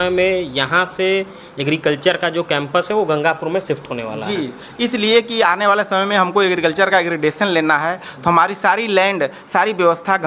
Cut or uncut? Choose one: uncut